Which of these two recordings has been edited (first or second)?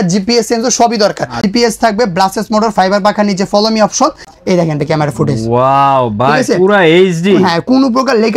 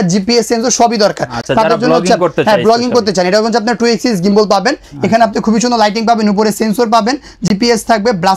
first